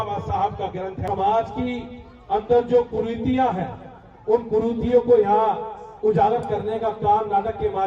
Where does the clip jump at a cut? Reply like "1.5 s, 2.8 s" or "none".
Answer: 1.0 s